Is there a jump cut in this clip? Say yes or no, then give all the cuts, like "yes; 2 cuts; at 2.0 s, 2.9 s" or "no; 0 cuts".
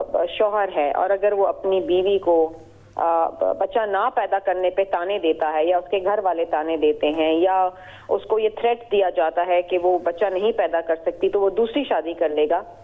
no; 0 cuts